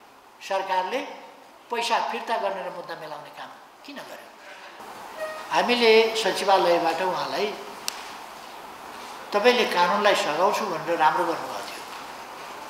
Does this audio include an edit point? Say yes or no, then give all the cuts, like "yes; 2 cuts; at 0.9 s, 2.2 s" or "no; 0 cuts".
yes; 1 cut; at 4.8 s